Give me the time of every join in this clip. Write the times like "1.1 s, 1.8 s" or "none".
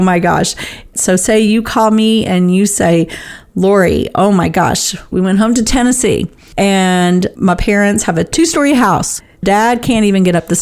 0.9 s, 9.4 s